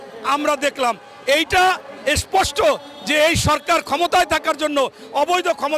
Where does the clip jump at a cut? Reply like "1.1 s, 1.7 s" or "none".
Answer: none